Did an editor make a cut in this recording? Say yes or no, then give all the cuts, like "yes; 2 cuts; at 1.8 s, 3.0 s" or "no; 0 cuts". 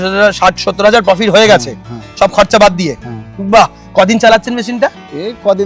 no; 0 cuts